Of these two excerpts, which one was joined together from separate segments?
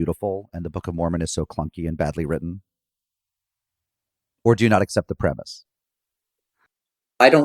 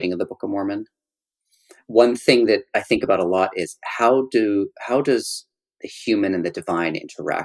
second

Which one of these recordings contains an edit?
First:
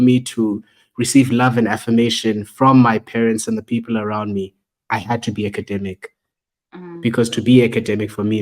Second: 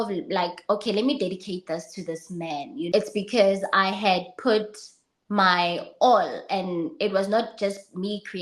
second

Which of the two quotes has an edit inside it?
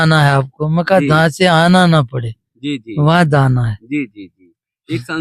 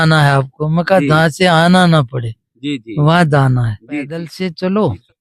second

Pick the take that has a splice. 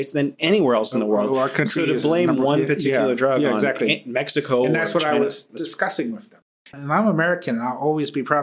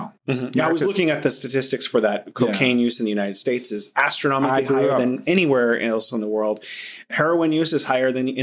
first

